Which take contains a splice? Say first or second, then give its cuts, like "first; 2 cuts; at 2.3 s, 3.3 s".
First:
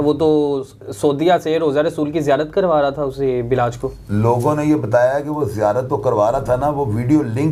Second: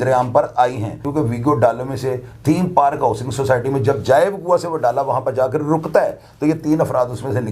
second; 1 cut; at 1.0 s